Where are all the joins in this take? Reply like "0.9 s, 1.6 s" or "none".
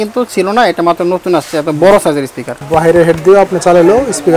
2.7 s